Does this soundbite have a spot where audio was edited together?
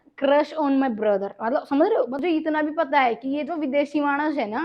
yes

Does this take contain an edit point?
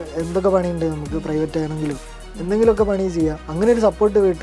yes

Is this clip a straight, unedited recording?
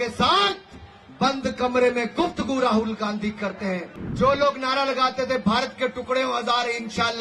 no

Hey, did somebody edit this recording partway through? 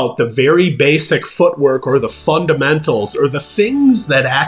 no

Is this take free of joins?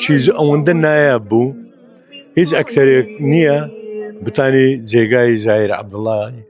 yes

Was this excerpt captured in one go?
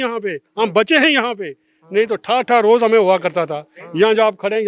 yes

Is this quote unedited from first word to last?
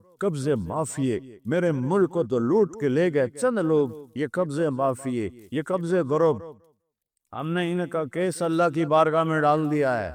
yes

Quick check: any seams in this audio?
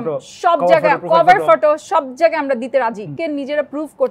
yes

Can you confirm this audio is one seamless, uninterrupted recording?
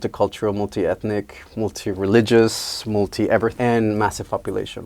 no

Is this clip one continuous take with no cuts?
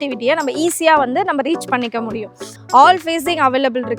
no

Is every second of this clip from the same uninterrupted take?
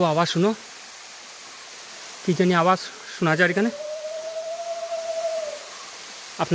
yes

